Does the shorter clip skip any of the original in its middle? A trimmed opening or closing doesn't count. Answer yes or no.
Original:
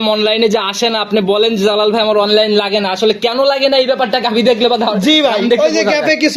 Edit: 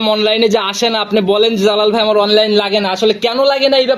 no